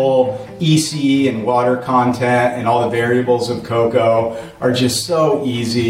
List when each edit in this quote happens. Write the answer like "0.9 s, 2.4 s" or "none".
none